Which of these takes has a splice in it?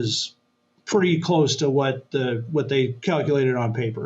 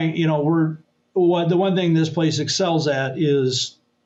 first; 1 cut; at 3.0 s

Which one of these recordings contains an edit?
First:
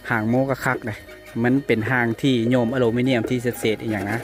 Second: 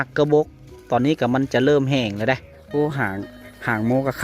second; 1 cut; at 2.5 s

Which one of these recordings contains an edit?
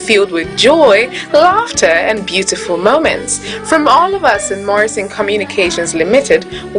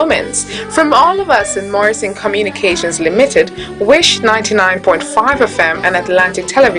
first; 1 cut; at 1.7 s

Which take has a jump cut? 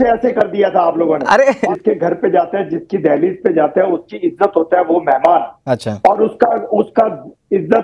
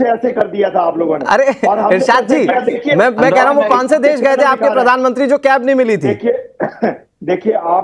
first; 1 cut; at 1.6 s

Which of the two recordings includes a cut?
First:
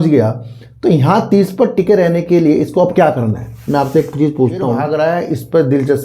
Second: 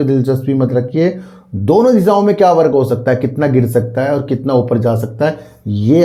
first; 1 cut; at 4.8 s

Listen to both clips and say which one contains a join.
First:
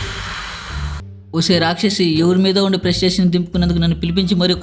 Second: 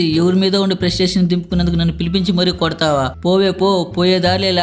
first; 1 cut; at 1.1 s

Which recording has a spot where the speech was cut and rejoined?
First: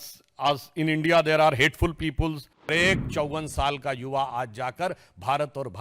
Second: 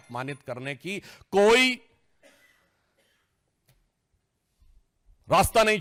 first; 1 cut; at 2.7 s

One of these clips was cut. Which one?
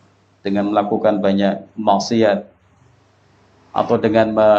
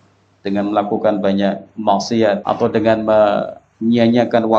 second; 1 cut; at 2.4 s

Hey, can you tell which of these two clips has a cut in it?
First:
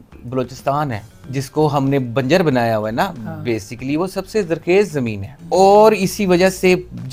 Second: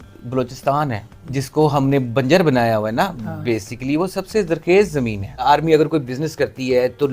second; 1 cut; at 5.4 s

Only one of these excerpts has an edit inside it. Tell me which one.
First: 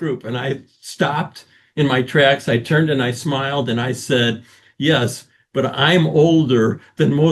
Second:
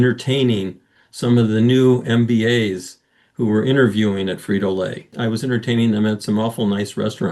second; 1 cut; at 5.1 s

